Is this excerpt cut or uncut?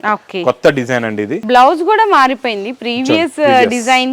cut